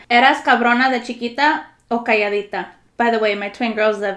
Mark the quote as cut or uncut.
uncut